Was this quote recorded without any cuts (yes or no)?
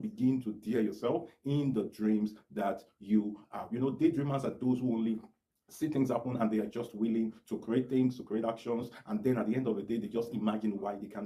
yes